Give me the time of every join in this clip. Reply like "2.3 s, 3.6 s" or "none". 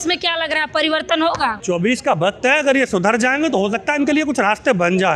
1.6 s